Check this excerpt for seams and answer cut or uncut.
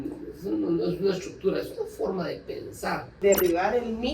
cut